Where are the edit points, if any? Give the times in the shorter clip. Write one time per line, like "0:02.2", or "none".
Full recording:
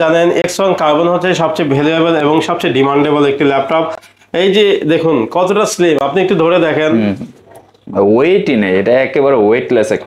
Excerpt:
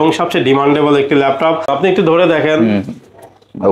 0:01.7

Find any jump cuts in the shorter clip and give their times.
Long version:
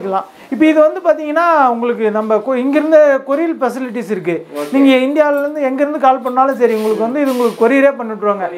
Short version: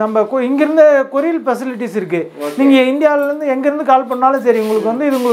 none

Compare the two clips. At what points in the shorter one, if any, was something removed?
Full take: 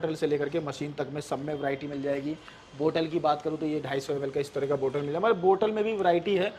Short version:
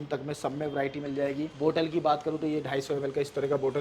0:01.5

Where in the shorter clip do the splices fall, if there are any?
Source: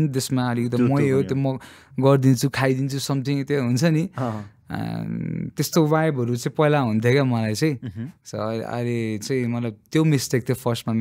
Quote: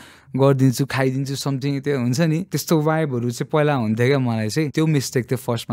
0:02.5
0:04.7

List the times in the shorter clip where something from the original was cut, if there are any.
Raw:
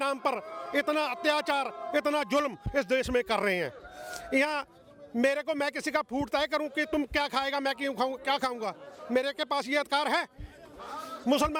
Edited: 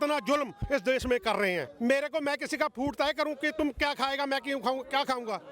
0:01.7

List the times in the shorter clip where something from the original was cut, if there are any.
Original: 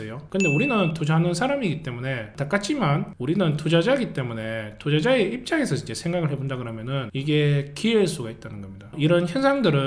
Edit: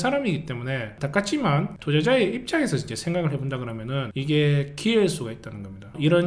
0:01.7

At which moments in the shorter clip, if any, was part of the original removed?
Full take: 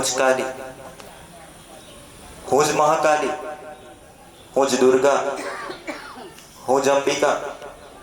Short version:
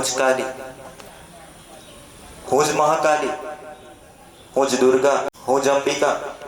0:05.3

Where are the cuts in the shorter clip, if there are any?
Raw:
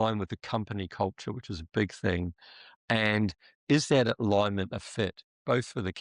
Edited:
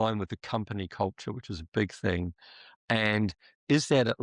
none

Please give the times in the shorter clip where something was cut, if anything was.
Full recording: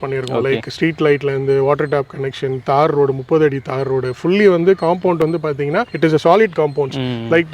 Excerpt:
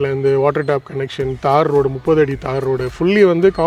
none

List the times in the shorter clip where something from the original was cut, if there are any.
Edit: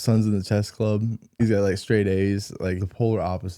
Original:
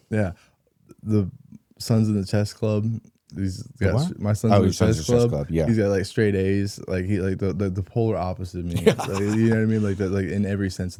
0:01.4
0:02.8

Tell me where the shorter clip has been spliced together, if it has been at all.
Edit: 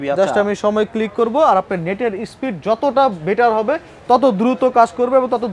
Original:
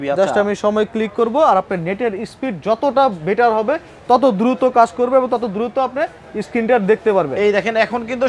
none

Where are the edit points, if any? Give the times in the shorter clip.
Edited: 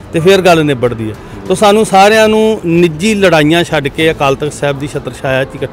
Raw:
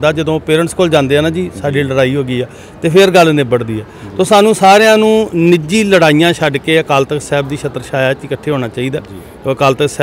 none

